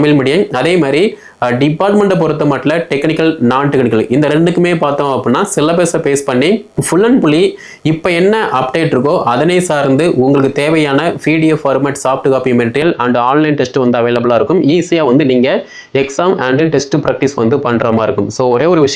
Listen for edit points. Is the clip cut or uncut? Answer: uncut